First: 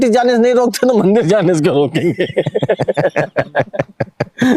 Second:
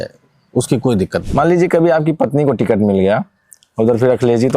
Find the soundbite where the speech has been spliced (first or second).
second